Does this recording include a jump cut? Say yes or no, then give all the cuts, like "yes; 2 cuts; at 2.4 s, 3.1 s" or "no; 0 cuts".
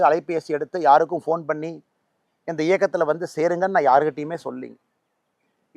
yes; 1 cut; at 3.6 s